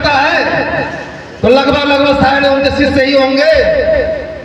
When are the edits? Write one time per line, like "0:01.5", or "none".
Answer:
none